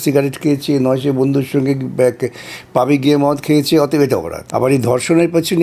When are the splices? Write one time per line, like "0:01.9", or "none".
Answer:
0:04.4